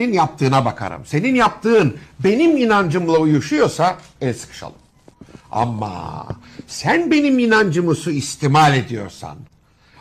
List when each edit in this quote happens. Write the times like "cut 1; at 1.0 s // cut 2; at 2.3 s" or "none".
cut 1; at 3.2 s